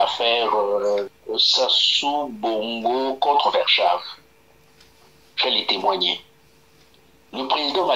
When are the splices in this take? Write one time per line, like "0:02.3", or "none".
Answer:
0:01.2

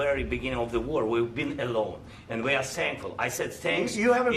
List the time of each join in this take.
none

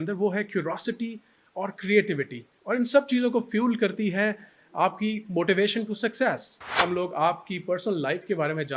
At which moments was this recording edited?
0:06.8

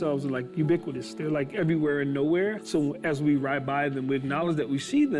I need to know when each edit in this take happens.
0:02.6

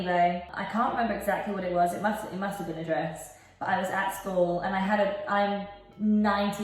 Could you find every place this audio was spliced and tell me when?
none

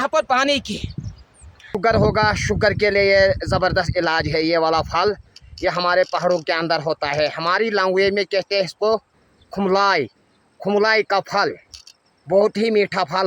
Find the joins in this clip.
0:01.8

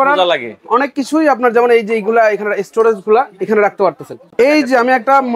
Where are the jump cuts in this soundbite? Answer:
0:04.2

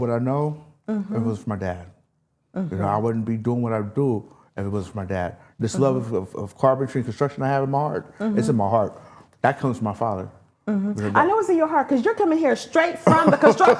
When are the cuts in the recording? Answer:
none

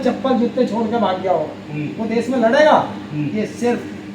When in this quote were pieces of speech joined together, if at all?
none

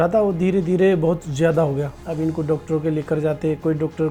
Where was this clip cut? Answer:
0:02.0

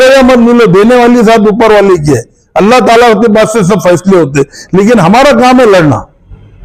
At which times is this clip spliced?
none

